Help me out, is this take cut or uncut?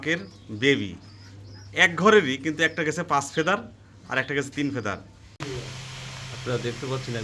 cut